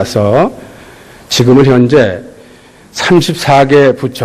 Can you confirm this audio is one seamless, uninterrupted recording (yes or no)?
no